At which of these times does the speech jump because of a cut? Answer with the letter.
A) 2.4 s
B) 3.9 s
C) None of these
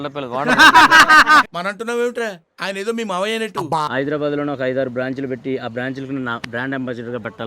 B